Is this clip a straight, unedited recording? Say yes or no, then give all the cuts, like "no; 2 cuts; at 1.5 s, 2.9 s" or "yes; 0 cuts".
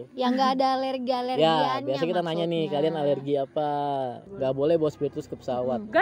no; 1 cut; at 4.2 s